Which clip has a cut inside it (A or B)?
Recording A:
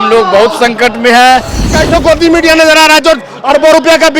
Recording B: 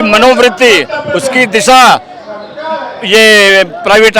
A